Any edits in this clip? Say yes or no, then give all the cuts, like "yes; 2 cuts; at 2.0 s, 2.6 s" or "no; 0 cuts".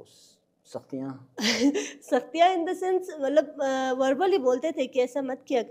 no; 0 cuts